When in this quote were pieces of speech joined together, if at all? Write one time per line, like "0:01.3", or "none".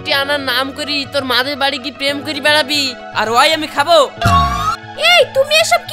none